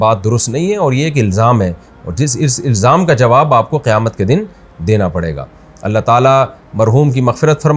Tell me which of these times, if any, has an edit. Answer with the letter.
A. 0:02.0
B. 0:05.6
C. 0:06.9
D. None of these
D